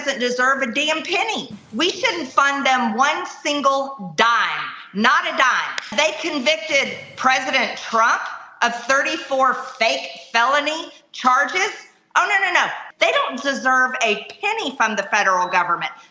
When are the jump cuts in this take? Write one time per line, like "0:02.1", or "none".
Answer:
0:05.9
0:12.8